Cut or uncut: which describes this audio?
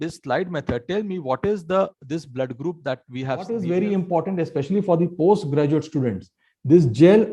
cut